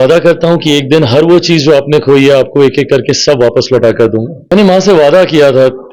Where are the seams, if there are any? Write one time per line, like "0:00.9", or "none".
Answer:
0:04.5